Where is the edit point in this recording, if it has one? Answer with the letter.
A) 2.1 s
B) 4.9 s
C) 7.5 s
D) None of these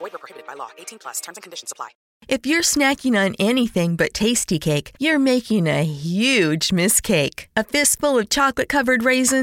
A